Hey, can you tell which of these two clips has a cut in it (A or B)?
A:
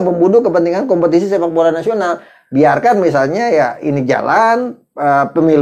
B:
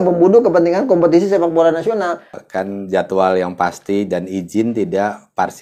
B